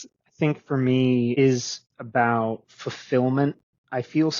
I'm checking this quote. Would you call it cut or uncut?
cut